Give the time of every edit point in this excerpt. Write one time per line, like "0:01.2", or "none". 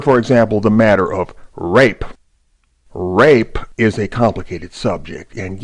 none